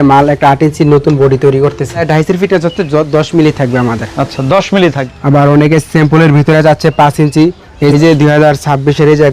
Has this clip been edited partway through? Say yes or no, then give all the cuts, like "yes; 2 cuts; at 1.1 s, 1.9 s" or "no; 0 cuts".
yes; 3 cuts; at 2.0 s, 5.1 s, 7.9 s